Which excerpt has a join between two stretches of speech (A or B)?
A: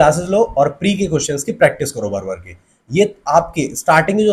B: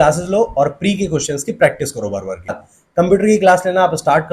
B